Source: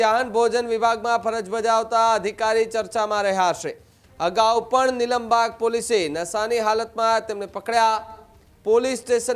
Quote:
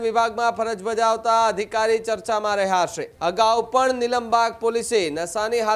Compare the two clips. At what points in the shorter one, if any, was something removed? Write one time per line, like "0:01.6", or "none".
0:03.0